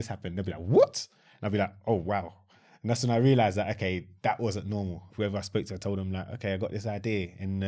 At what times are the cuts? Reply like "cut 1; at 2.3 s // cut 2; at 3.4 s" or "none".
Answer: cut 1; at 5.0 s